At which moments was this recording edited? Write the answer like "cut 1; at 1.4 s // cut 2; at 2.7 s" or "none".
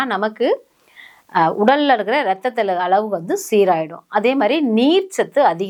none